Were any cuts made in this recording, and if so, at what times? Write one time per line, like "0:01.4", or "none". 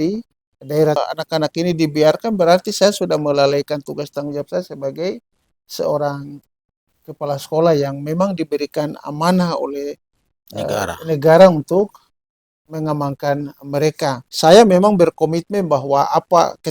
0:01.0
0:14.3